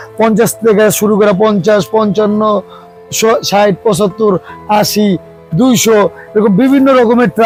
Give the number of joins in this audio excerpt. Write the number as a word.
zero